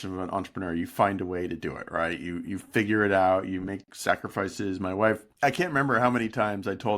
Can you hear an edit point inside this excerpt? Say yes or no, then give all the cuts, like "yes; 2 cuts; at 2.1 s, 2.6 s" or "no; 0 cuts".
yes; 1 cut; at 5.3 s